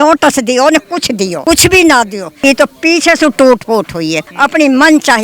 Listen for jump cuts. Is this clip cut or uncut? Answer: cut